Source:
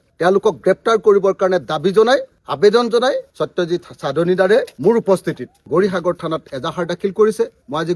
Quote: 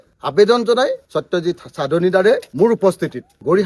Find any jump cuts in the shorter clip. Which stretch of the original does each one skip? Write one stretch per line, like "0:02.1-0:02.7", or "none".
none